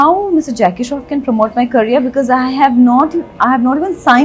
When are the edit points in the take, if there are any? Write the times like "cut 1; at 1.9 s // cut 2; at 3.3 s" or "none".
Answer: none